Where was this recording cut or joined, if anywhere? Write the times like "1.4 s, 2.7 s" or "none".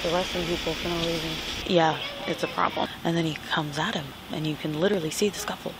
1.6 s, 2.9 s